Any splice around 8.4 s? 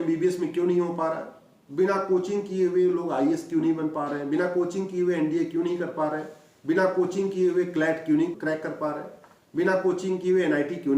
yes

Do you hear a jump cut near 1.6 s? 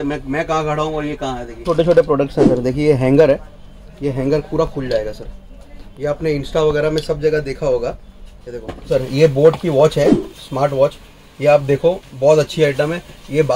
yes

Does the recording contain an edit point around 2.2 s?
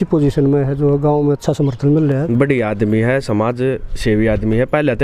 yes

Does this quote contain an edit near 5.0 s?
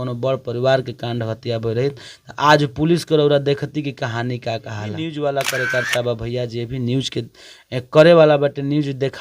yes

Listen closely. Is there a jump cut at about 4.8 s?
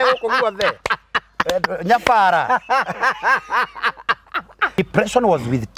yes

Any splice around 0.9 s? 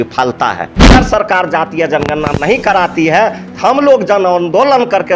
yes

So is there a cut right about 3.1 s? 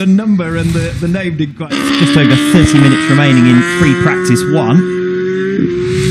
no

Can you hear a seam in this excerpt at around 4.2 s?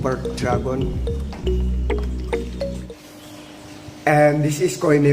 no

